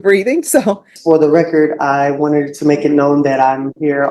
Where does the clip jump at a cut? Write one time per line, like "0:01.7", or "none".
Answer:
0:00.9